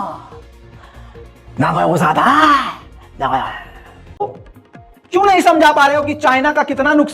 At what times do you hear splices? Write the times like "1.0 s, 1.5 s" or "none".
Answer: 4.2 s